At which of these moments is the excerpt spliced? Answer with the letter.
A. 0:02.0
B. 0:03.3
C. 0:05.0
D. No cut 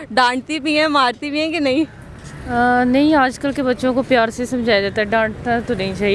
D